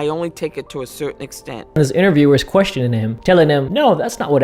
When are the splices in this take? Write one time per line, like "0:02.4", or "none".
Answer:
0:01.8